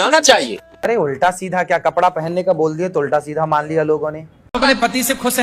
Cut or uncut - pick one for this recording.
cut